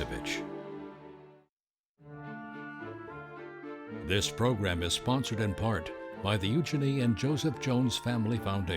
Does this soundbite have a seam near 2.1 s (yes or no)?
yes